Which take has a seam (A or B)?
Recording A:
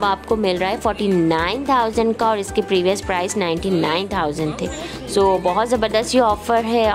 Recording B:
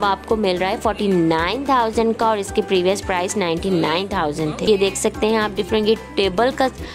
B